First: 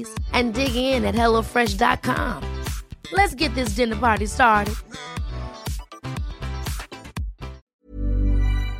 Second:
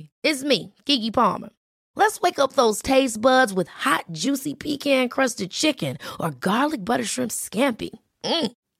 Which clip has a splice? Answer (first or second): first